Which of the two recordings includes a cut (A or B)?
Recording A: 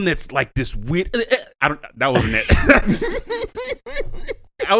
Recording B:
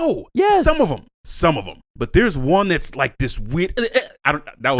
B